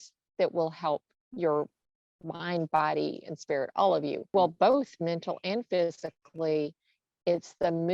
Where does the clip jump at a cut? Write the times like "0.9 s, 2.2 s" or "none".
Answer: 1.2 s, 4.2 s